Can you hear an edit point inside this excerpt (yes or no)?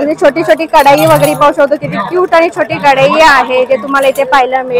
no